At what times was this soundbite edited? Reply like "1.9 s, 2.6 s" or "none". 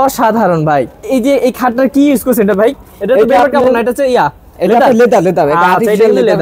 1.0 s

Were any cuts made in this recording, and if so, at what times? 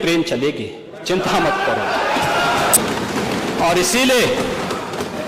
2.8 s

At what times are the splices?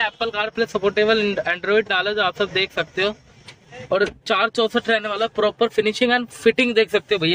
none

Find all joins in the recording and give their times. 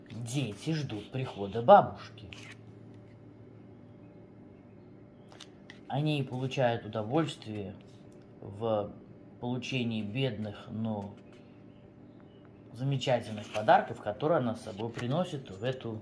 none

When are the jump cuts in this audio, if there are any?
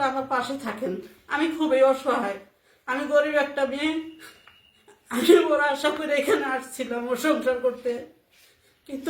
none

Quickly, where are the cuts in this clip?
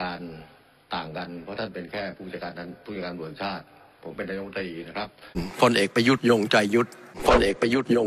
5.5 s

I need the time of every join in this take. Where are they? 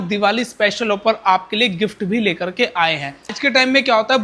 3.3 s

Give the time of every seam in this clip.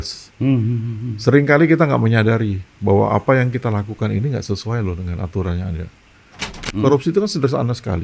6.6 s

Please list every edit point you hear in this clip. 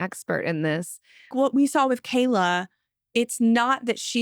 1.3 s

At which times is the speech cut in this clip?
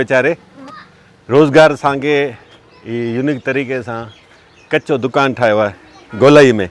none

